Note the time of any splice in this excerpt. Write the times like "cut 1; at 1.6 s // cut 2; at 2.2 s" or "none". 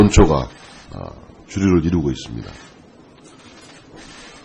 none

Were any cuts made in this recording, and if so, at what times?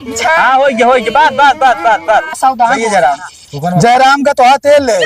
cut 1; at 2.4 s

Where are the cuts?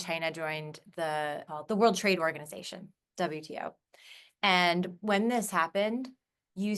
cut 1; at 1.4 s

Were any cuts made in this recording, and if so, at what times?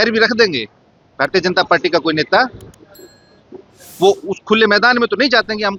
none

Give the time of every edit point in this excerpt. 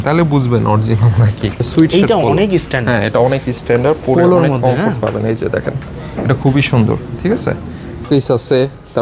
cut 1; at 1.6 s // cut 2; at 8.1 s

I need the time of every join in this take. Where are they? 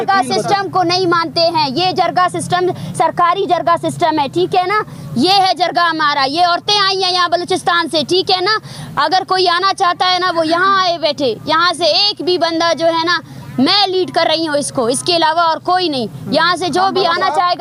none

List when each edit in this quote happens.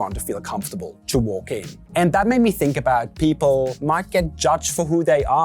cut 1; at 1.8 s // cut 2; at 3.8 s

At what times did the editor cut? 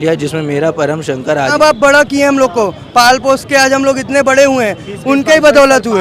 cut 1; at 1.5 s

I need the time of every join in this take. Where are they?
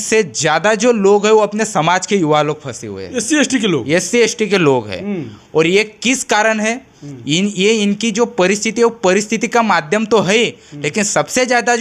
none

